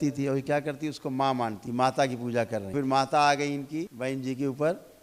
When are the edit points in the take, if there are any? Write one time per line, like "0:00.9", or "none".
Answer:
0:01.6
0:02.7
0:03.9